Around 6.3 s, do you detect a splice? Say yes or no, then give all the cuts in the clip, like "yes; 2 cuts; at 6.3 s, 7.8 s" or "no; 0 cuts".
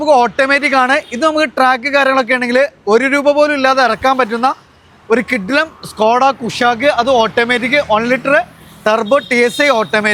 no; 0 cuts